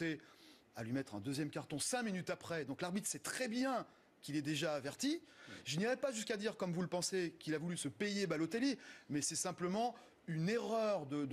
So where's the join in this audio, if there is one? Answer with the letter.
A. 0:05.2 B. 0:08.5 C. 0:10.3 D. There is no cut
B